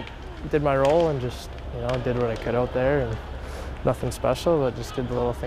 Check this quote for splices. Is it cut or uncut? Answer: cut